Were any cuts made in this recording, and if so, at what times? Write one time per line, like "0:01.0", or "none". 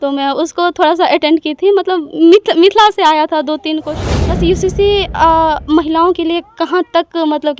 0:03.8